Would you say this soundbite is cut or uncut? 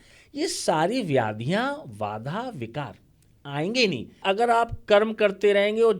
cut